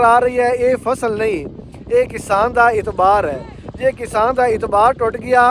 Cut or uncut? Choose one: uncut